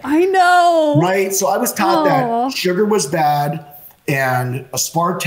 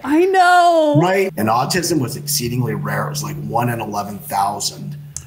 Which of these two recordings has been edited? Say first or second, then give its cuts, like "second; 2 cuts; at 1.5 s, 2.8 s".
second; 1 cut; at 1.3 s